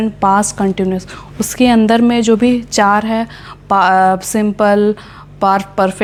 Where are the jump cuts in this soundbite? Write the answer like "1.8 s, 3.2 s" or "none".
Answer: none